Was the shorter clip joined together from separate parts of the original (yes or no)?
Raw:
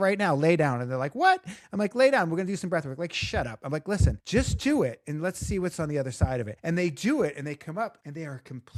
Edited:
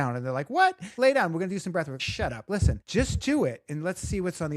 yes